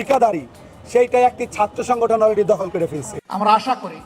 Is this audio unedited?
no; 1 cut; at 3.1 s

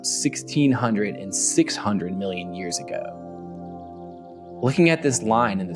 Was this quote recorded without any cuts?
yes; 0 cuts

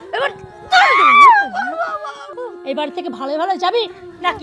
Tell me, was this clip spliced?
yes; 1 cut; at 2.3 s

